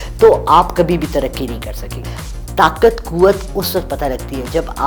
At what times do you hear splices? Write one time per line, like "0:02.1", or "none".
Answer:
0:02.0

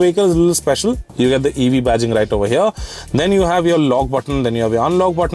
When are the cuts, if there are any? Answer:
none

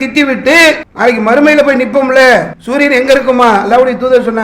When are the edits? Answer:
0:00.9
0:02.6

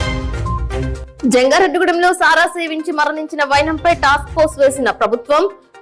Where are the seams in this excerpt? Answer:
none

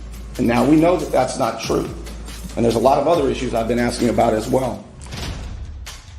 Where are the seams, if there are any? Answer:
0:04.9

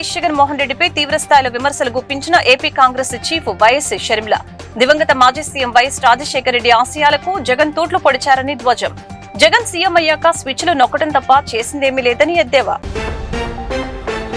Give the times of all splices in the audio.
none

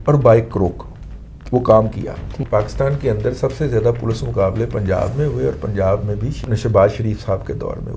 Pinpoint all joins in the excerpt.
0:02.4
0:06.4

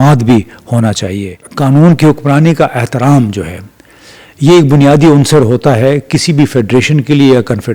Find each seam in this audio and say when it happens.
0:01.5

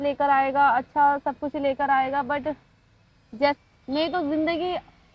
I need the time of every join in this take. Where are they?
0:03.6

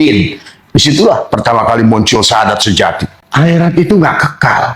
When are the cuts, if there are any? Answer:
0:03.2

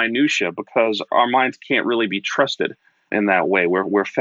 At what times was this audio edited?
0:01.0
0:03.1

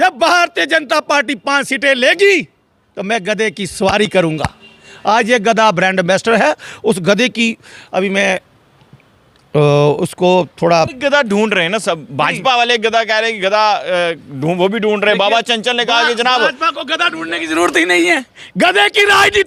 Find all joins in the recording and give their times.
none

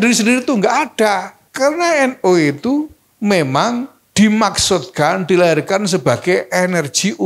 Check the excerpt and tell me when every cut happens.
0:01.4
0:03.0
0:04.0

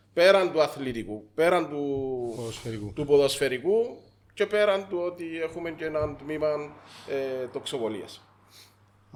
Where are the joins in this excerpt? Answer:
none

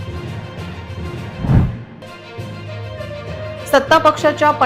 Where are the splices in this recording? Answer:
0:01.3
0:02.0
0:03.6

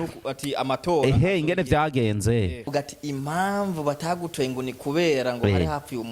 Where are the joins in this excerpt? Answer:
0:02.6

